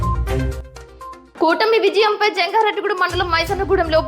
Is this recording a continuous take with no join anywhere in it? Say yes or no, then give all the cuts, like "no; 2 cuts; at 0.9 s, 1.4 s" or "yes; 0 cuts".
no; 1 cut; at 1.1 s